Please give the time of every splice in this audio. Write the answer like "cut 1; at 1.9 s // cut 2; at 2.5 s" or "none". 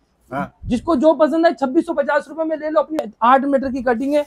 cut 1; at 3.0 s